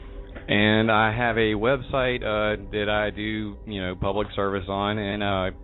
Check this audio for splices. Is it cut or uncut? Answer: cut